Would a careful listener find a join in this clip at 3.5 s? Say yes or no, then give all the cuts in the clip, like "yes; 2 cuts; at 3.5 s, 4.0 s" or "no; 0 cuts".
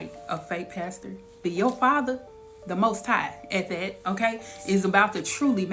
no; 1 cut; at 1.4 s